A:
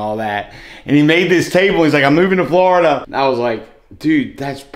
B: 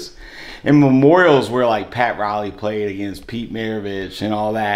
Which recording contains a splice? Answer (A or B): A